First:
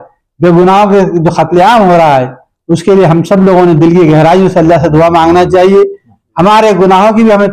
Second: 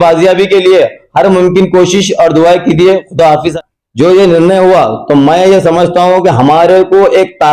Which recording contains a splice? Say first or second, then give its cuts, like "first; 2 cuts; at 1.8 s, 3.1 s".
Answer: second; 1 cut; at 3.3 s